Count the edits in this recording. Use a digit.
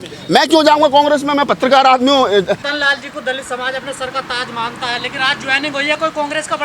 1